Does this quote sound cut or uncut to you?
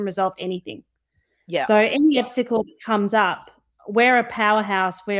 uncut